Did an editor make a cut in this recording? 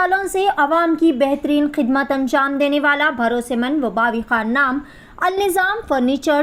no; 0 cuts

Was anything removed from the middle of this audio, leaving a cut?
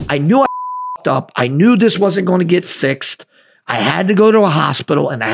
no; 0 cuts

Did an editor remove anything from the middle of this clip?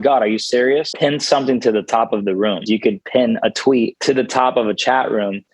yes; 3 cuts; at 0.9 s, 2.6 s, 4.0 s

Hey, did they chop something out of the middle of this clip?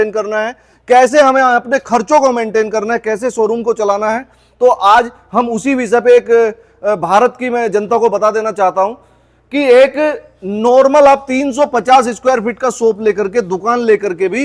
no; 0 cuts

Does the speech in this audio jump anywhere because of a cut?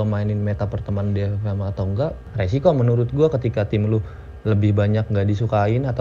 yes; 1 cut; at 2.2 s

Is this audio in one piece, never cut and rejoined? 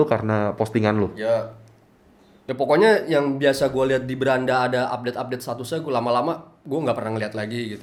yes; 0 cuts

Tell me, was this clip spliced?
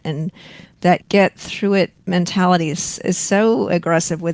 yes; 2 cuts; at 1.0 s, 2.0 s

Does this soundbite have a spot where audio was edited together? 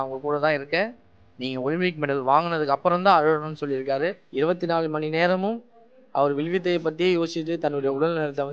yes; 1 cut; at 4.2 s

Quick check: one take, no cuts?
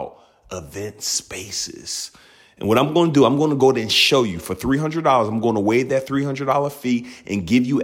yes; 0 cuts

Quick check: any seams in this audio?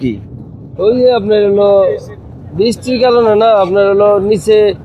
no; 0 cuts

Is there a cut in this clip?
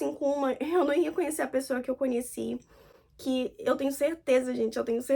no; 0 cuts

